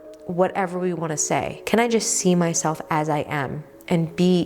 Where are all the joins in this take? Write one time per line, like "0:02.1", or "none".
0:01.6